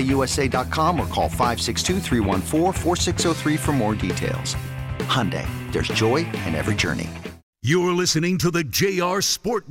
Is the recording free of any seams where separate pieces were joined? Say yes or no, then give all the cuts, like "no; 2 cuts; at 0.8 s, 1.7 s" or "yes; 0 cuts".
no; 1 cut; at 7.4 s